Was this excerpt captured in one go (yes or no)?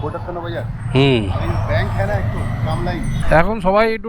no